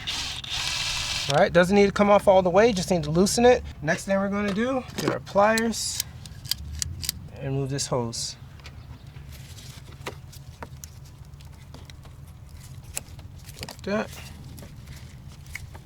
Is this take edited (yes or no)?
yes